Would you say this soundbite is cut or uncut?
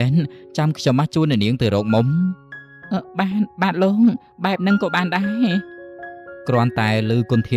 uncut